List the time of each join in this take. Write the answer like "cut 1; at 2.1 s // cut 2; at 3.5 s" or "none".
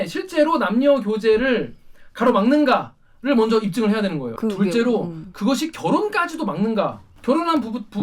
cut 1; at 4.3 s // cut 2; at 7.1 s